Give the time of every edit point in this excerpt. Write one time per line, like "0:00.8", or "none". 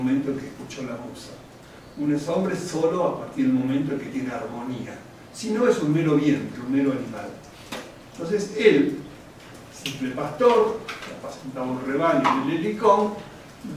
none